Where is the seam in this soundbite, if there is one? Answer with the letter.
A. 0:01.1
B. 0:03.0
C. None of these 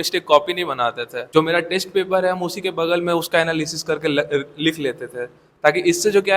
A